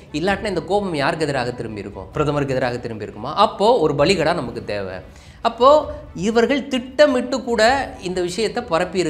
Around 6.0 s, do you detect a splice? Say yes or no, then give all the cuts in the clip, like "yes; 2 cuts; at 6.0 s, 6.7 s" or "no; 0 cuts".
no; 1 cut; at 2.1 s